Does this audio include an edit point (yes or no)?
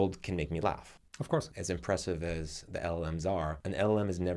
yes